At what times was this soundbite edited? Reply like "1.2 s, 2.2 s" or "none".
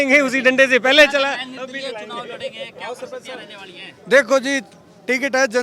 none